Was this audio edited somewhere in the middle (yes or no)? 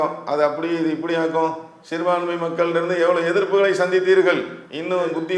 no